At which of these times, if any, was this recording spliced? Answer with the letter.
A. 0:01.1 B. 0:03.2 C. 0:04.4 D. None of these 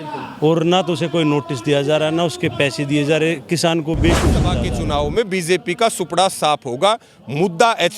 C